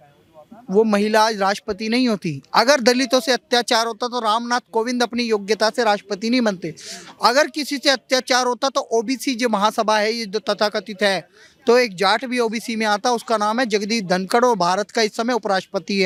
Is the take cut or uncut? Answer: uncut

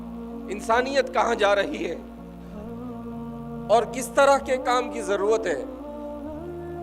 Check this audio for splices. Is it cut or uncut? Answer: cut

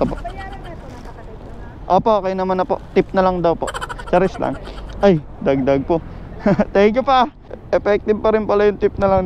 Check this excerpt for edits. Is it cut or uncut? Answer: cut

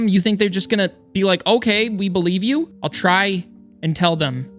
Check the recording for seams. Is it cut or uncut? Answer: cut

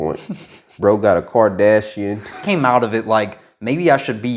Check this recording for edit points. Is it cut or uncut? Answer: cut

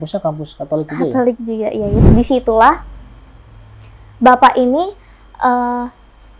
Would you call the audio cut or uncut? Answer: cut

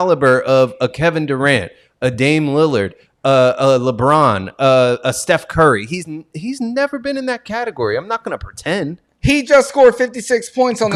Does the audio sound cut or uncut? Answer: uncut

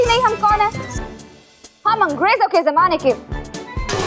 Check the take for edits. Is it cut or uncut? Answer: uncut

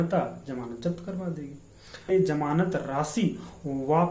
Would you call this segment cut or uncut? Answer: cut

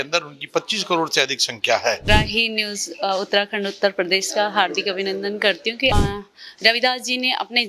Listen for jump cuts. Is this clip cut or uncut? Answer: cut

